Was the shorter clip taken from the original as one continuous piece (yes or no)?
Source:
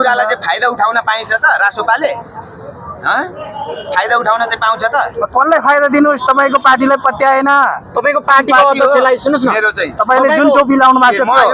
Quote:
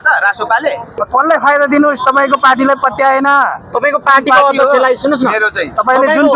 no